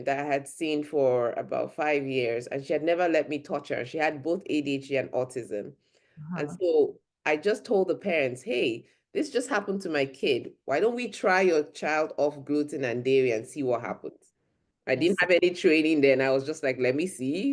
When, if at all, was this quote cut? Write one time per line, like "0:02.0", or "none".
none

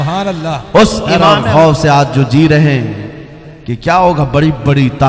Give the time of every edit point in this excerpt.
0:01.3

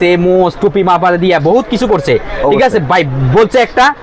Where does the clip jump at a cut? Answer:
none

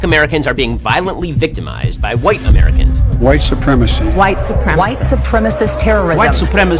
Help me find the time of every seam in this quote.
none

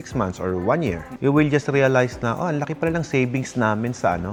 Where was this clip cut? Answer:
none

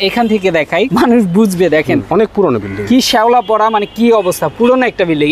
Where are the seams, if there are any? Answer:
0:00.9
0:02.1

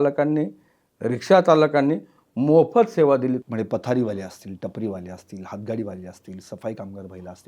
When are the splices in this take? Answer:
0:03.5

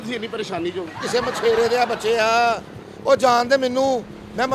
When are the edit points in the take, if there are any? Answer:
0:00.9

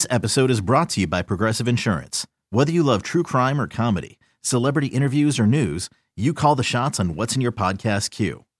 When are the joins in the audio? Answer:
none

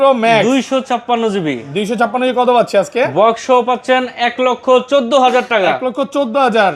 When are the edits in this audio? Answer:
none

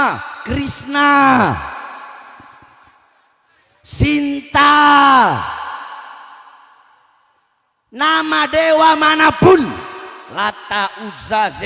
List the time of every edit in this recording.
none

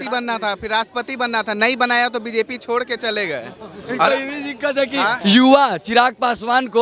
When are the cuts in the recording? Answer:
none

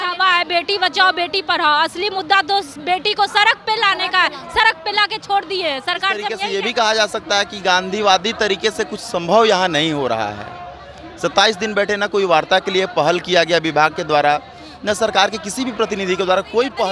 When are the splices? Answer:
0:06.4

